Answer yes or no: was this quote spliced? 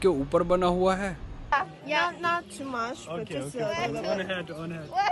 yes